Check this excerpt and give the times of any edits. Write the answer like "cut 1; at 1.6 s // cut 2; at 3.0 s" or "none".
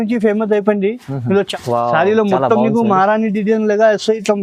cut 1; at 1.5 s